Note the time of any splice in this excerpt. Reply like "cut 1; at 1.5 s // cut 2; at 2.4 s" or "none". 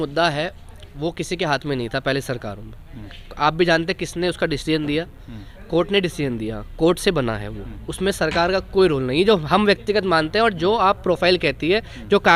none